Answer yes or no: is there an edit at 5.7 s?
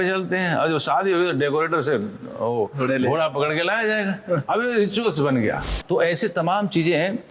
yes